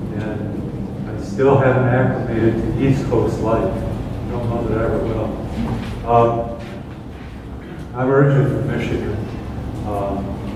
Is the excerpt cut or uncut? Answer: uncut